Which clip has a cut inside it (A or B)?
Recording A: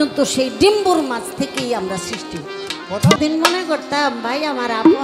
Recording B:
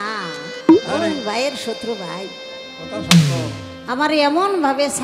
A